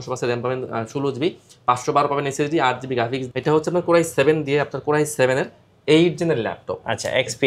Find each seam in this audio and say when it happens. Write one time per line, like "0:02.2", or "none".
0:03.3